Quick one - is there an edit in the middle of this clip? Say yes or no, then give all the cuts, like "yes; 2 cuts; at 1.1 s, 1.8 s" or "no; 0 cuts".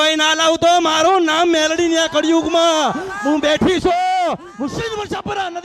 no; 0 cuts